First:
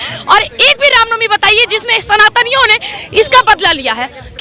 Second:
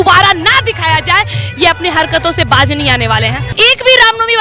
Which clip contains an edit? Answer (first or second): second